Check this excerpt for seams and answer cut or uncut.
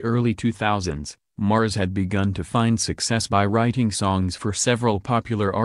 uncut